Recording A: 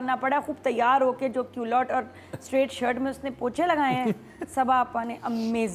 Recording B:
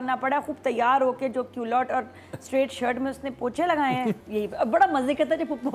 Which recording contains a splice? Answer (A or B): B